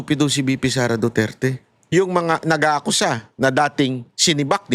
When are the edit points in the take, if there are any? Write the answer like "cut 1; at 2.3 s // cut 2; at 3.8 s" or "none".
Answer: cut 1; at 1.9 s